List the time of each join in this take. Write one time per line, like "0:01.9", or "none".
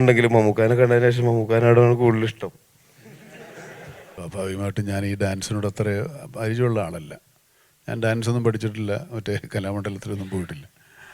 0:04.0